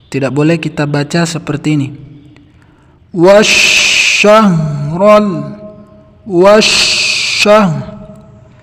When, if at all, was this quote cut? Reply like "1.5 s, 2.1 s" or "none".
none